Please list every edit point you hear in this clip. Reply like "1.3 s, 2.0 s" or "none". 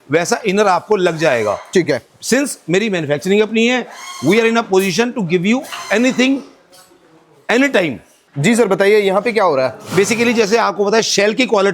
none